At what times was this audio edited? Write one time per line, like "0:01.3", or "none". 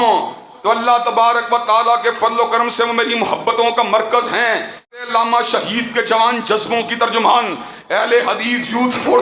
0:05.0